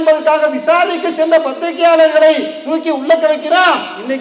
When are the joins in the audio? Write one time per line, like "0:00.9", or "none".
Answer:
none